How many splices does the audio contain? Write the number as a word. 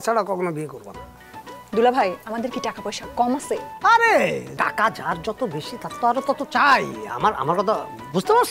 one